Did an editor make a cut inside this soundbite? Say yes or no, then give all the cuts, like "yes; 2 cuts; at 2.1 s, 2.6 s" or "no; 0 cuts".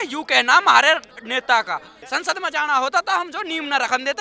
yes; 1 cut; at 2.0 s